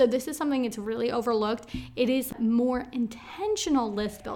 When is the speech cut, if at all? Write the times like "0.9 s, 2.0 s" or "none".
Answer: 2.3 s